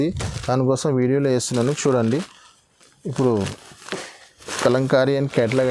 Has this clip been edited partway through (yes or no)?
no